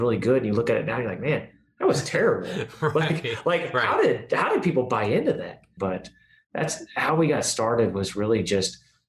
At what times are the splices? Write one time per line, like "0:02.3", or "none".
0:05.7